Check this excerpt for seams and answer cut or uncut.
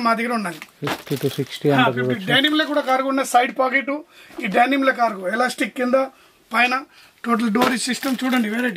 uncut